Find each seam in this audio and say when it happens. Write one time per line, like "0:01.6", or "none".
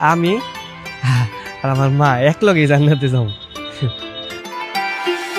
none